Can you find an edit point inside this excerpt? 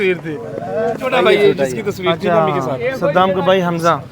yes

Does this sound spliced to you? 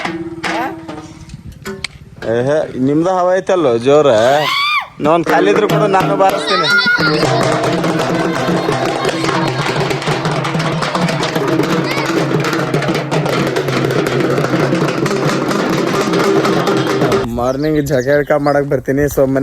yes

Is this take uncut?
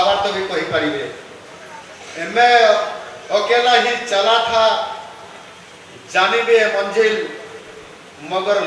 yes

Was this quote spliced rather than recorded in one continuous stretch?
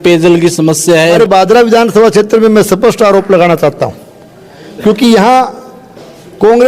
yes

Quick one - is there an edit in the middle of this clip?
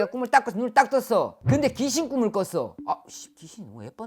yes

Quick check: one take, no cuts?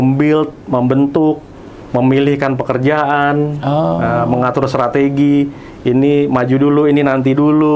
yes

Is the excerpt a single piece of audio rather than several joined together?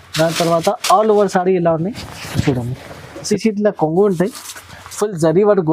no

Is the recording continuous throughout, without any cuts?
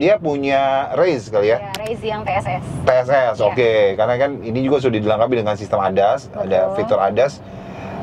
yes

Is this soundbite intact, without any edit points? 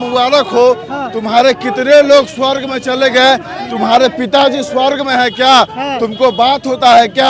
yes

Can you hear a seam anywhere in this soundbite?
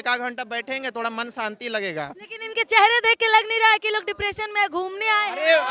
no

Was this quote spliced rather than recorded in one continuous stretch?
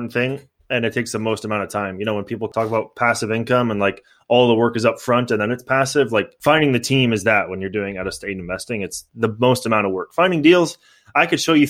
yes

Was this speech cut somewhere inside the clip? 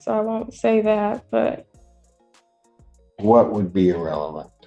no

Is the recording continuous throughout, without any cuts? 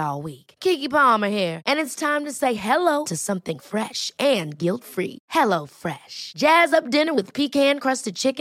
yes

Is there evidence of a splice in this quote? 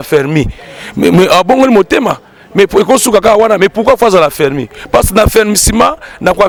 no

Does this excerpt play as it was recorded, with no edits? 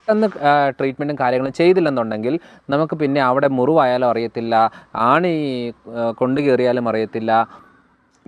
yes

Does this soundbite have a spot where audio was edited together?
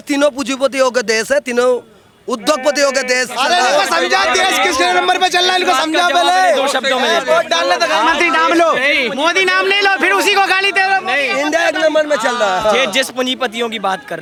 no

